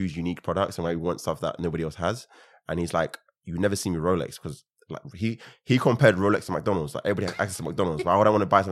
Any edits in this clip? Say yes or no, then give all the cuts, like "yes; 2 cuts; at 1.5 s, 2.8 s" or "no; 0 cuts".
no; 0 cuts